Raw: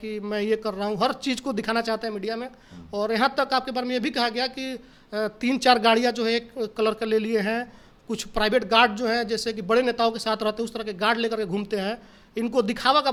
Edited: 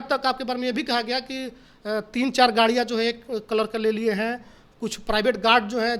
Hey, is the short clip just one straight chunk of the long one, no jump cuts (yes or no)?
yes